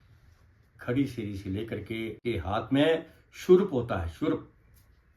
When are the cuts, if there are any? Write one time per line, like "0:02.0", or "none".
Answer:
0:02.2